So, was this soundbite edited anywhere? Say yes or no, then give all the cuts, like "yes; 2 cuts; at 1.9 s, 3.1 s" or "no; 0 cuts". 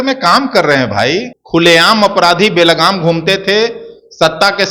yes; 1 cut; at 1.3 s